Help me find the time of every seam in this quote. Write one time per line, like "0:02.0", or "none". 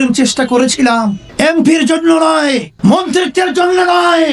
0:01.2
0:02.7